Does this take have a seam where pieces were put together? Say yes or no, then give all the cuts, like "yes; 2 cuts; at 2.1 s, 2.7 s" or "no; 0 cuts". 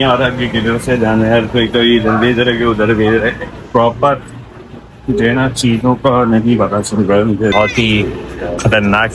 yes; 1 cut; at 7.5 s